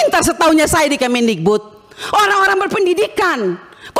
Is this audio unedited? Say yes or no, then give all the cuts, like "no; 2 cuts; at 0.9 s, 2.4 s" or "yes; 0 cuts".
yes; 0 cuts